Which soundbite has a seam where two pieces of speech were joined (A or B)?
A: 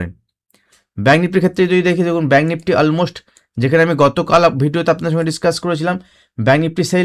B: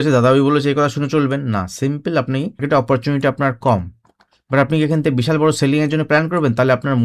B